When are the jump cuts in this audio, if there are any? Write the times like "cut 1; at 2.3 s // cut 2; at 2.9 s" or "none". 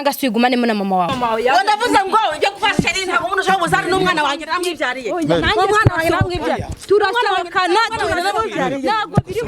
cut 1; at 1.1 s